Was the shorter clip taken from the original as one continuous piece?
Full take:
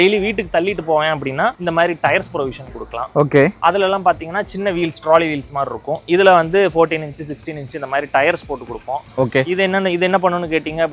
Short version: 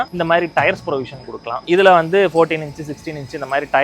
no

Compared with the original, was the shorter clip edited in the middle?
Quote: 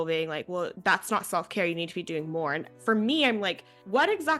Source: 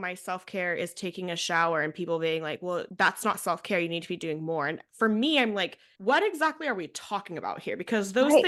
no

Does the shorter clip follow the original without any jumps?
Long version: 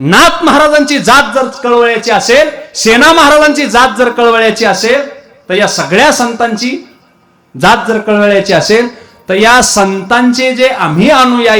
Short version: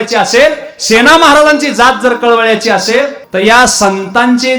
no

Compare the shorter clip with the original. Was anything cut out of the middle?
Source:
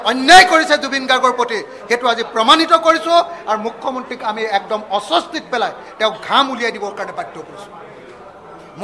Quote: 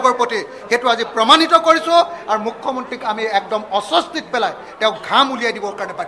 no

